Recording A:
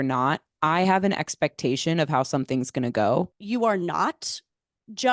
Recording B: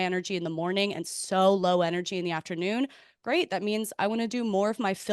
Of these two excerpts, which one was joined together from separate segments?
A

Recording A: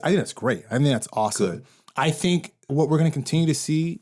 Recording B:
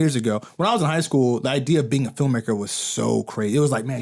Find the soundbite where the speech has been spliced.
A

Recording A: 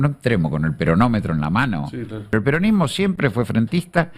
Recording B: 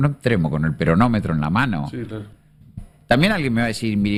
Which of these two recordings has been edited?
A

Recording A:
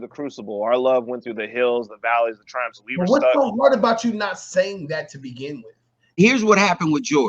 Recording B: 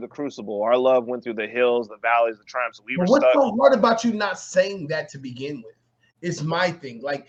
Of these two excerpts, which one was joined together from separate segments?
A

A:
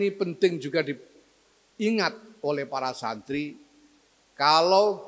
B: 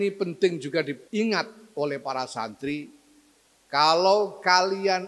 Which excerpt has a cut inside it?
B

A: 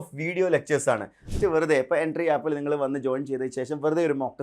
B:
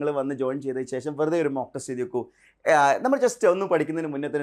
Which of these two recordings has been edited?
A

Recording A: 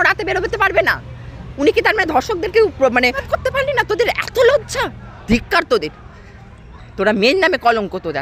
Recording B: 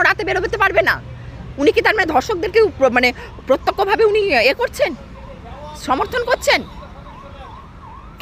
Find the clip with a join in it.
A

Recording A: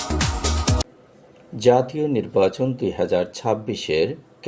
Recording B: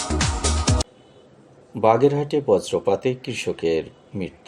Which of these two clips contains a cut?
A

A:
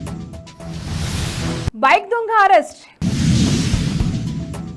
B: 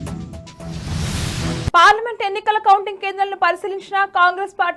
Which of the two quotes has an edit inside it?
B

